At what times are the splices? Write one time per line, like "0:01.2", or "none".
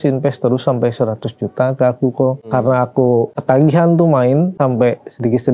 0:02.4
0:03.3
0:04.5

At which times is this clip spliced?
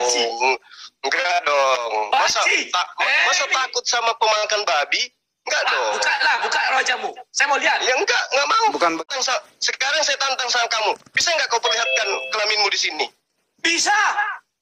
0:09.0

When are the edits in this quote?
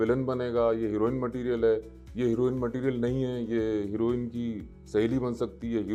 none

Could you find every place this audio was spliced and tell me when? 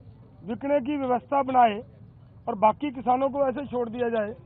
none

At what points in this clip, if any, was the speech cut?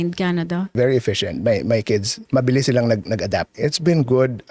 0:00.7
0:02.2
0:03.5

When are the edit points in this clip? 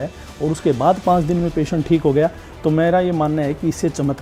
none

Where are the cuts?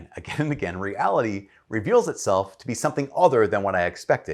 none

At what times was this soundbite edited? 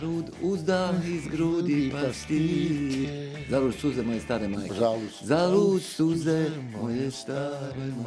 none

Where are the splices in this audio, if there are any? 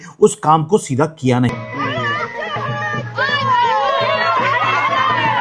0:01.6

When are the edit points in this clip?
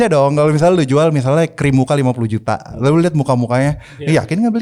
none

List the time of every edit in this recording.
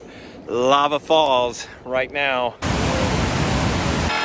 0:02.6

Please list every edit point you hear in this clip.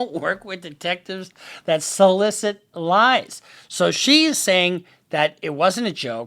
none

